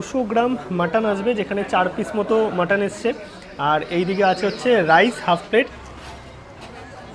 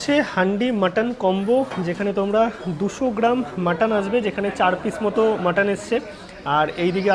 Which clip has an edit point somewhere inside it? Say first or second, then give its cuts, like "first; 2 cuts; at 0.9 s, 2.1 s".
first; 1 cut; at 5.7 s